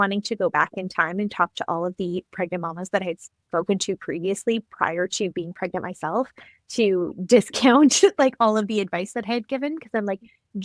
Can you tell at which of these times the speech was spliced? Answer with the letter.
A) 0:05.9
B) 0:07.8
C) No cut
C